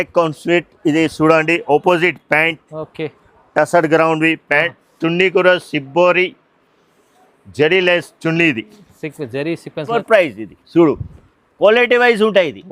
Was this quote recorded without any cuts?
no; 1 cut; at 9.9 s

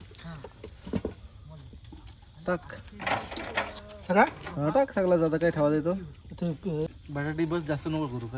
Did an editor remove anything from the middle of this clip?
yes; 1 cut; at 6.9 s

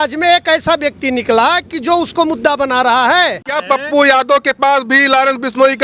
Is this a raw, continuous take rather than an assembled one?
no; 1 cut; at 3.5 s

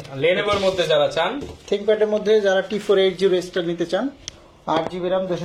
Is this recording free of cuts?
yes; 0 cuts

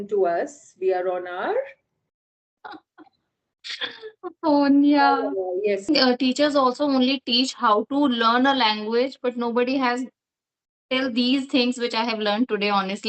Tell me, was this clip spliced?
yes; 1 cut; at 5.9 s

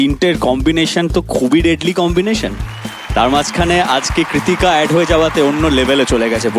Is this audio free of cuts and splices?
yes; 0 cuts

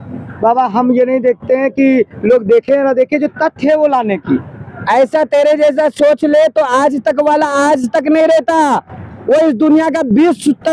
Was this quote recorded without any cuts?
yes; 0 cuts

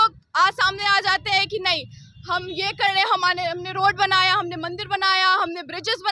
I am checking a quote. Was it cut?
no; 0 cuts

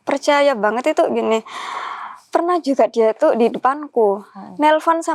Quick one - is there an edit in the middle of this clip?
no; 0 cuts

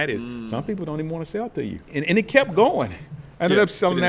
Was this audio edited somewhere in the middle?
yes; 1 cut; at 1.9 s

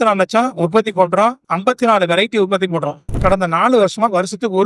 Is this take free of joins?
no; 2 cuts; at 1.4 s, 3.2 s

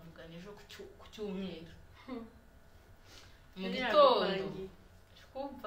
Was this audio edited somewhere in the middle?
no; 0 cuts

